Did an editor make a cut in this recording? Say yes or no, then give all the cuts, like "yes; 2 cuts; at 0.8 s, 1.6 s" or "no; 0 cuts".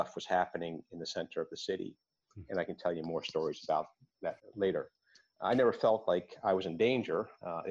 no; 0 cuts